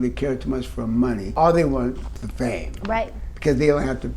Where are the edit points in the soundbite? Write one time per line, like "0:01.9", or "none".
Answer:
0:01.3